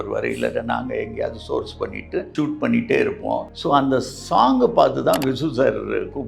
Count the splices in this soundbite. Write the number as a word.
two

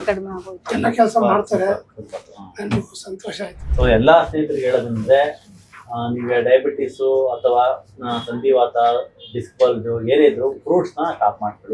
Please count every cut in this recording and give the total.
one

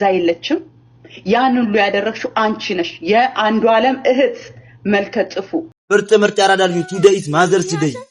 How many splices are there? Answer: one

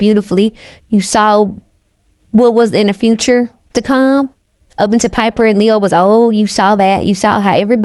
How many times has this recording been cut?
zero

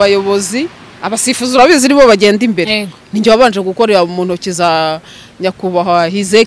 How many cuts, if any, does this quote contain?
zero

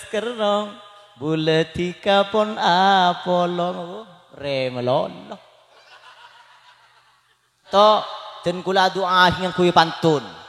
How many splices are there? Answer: one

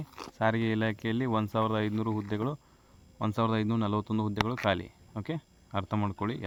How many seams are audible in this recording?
zero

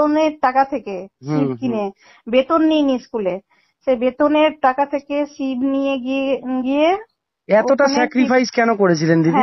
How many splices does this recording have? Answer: zero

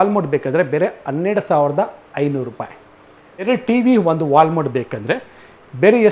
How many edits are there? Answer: one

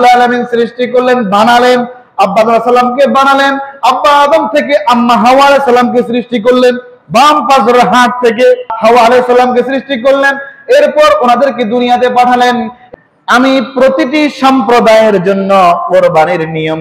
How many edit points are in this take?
two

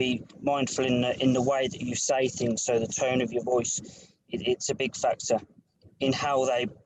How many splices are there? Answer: one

